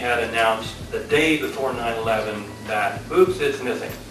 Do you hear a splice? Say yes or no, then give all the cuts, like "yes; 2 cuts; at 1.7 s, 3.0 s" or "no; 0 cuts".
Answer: no; 0 cuts